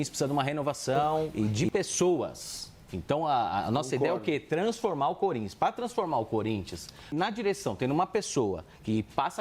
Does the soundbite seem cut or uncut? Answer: cut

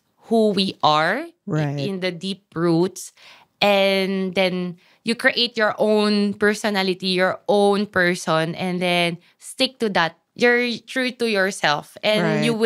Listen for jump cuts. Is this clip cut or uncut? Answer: cut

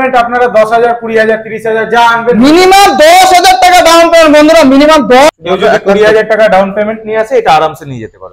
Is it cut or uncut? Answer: cut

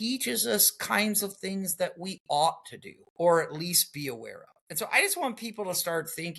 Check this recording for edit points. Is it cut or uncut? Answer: uncut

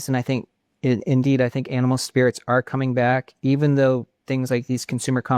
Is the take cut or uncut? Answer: uncut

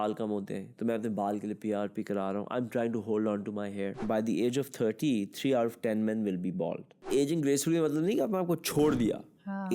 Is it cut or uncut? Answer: cut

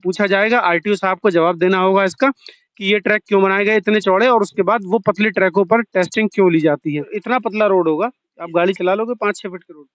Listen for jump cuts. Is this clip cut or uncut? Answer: uncut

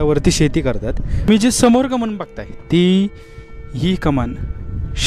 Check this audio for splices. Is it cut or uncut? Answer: cut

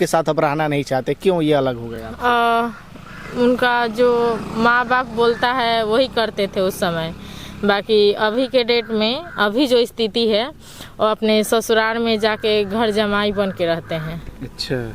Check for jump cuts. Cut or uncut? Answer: uncut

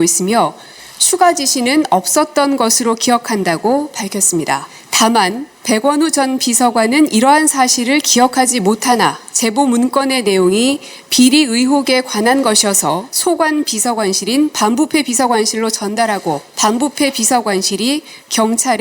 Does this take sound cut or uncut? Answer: cut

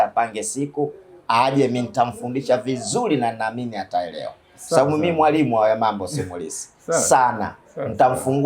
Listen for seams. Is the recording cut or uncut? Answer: uncut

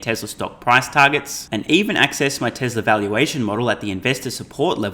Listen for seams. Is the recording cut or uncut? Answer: uncut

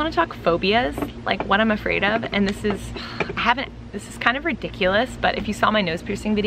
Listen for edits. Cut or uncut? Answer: uncut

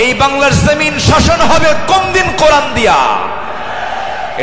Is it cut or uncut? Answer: uncut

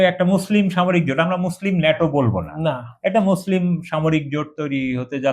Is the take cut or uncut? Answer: uncut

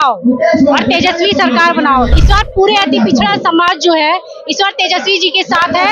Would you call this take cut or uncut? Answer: cut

